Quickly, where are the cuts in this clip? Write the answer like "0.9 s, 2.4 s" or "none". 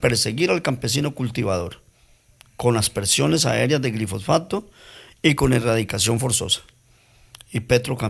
none